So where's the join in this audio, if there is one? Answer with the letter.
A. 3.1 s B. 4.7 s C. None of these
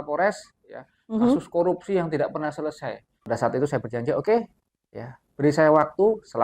A